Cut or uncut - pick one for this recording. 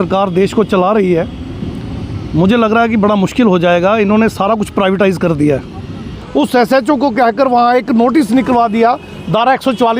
cut